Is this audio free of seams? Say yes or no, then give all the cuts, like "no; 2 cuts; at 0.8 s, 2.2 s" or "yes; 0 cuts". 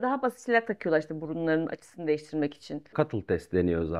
no; 1 cut; at 2.9 s